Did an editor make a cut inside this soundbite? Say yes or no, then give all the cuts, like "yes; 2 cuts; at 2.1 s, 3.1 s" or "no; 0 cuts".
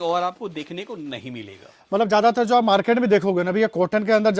no; 0 cuts